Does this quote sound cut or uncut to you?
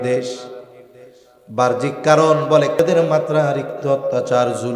cut